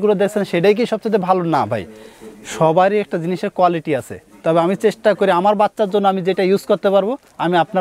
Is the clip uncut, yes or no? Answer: yes